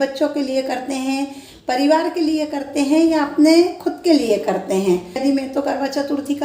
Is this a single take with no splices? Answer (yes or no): no